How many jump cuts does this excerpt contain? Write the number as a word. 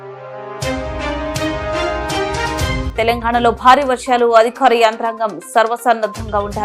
one